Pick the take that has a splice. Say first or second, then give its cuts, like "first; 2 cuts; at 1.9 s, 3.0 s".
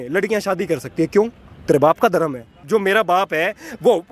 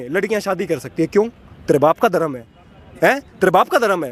first; 1 cut; at 2.6 s